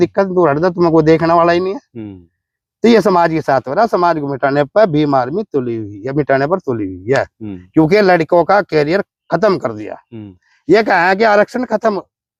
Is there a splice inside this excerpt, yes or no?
no